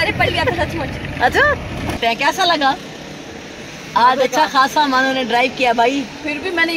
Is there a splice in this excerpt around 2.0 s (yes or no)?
yes